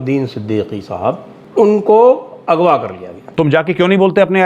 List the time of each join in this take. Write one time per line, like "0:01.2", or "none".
0:01.3
0:03.3